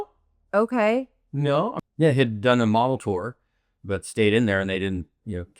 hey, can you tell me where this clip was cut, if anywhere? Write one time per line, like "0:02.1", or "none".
0:01.7

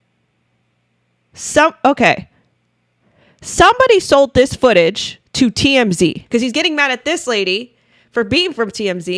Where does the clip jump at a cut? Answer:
0:06.2

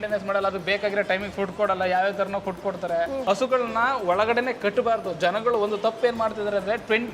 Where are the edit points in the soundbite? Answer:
0:03.2

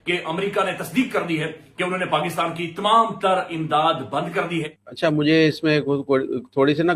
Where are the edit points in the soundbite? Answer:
0:04.8

